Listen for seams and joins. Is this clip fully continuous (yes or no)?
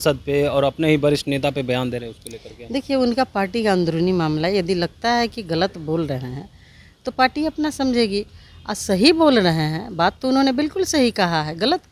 yes